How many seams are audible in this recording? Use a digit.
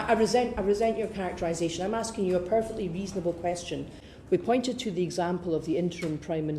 1